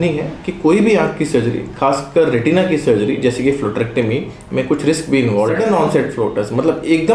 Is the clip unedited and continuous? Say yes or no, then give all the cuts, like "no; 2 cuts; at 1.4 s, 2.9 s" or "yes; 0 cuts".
no; 1 cut; at 5.6 s